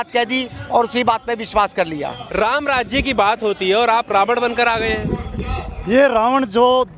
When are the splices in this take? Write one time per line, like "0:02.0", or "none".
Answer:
0:02.2